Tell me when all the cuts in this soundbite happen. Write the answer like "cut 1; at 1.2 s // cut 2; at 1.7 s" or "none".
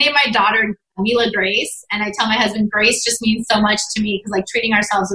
cut 1; at 1.0 s